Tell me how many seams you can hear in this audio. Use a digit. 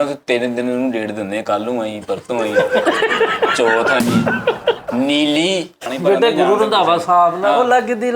1